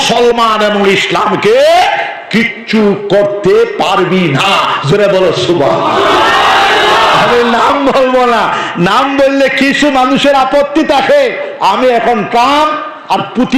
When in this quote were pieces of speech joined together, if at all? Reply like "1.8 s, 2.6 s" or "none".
none